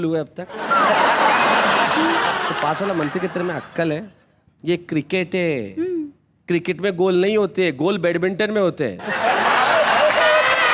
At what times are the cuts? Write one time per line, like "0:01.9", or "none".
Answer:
none